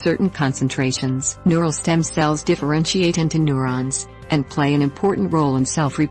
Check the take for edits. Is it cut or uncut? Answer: cut